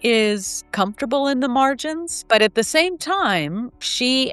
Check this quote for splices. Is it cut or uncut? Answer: uncut